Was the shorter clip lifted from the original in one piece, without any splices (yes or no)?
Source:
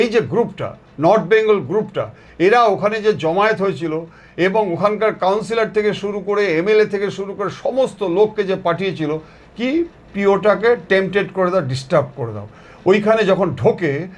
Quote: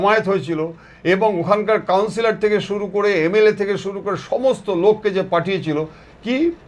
yes